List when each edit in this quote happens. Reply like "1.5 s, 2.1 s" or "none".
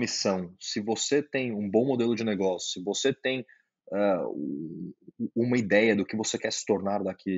none